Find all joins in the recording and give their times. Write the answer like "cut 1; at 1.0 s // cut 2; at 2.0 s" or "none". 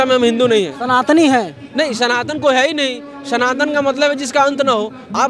none